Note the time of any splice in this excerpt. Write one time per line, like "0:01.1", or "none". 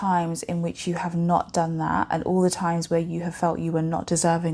none